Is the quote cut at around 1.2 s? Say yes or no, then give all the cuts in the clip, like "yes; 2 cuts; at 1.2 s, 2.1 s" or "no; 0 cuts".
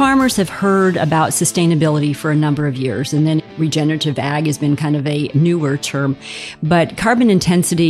no; 2 cuts; at 3.5 s, 5.3 s